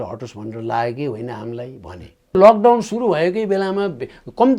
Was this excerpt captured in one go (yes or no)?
no